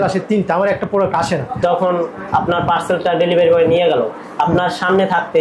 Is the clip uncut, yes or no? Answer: no